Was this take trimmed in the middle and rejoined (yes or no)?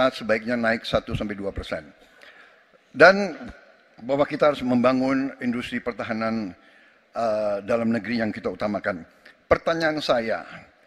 no